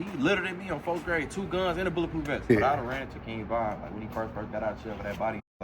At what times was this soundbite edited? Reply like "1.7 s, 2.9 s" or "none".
2.3 s